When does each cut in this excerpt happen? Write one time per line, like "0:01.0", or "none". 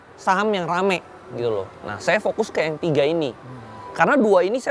none

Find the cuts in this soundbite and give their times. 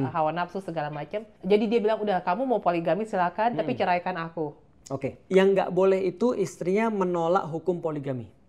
0:01.3
0:05.2

